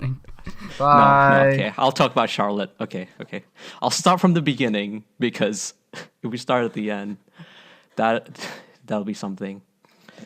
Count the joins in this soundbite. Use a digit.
0